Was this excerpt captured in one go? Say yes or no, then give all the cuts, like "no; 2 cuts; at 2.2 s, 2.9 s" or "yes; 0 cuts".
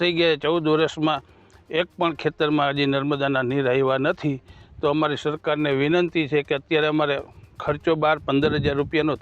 yes; 0 cuts